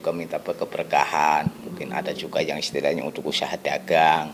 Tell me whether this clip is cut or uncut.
uncut